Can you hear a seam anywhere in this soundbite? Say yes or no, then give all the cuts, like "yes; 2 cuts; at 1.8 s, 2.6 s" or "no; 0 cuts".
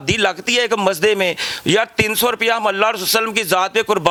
no; 0 cuts